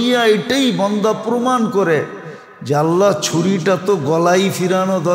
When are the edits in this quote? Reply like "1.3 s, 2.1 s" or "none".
none

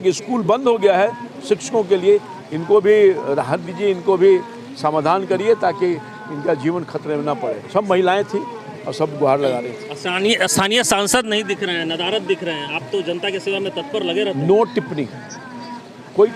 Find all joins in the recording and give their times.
none

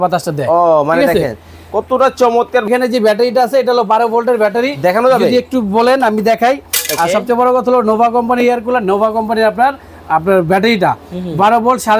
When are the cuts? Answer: 2.7 s

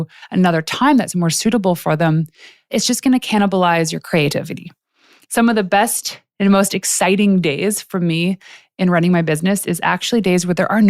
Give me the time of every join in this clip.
2.7 s, 5.1 s

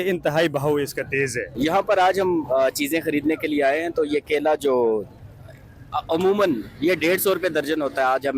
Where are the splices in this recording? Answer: 1.4 s

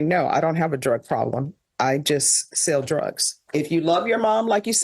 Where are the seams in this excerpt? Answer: 3.4 s

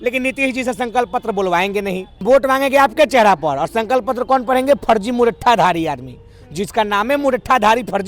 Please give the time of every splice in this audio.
2.2 s

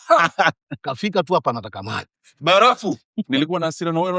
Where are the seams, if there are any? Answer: 3.2 s

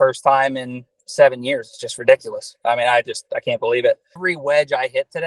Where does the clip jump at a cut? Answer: 4.3 s

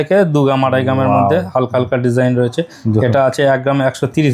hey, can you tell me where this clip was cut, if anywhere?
none

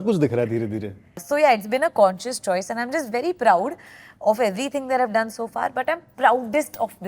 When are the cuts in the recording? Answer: 1.2 s

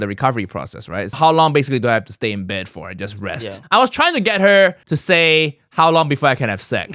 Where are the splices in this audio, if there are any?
1.1 s, 3.5 s, 4.9 s

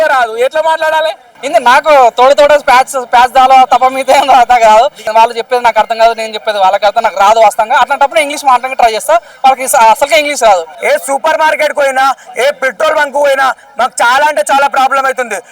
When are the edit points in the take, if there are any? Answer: 1.3 s, 5.1 s, 10.7 s

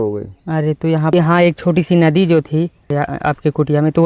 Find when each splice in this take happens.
1.1 s, 2.9 s

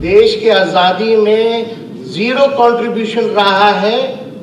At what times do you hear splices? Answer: none

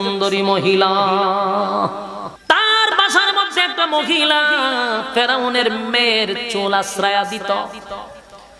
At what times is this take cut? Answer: 2.3 s

